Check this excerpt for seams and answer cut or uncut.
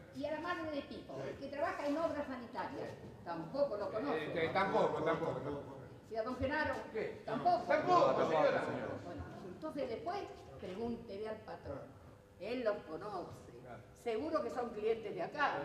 uncut